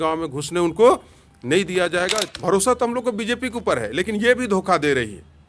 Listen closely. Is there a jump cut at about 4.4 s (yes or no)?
no